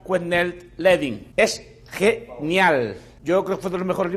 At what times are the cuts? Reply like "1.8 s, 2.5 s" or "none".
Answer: 1.2 s, 3.1 s